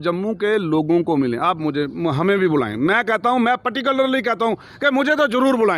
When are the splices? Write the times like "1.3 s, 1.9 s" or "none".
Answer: none